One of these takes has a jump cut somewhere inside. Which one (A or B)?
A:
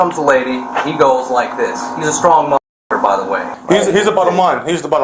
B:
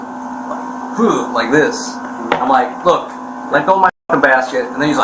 A